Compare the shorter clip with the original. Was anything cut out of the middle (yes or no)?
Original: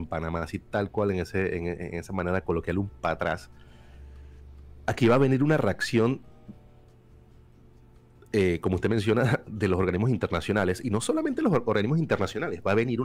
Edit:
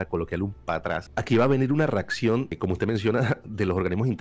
yes